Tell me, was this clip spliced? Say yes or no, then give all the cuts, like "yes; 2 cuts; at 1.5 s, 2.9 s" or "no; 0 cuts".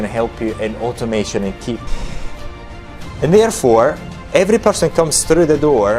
yes; 1 cut; at 1.9 s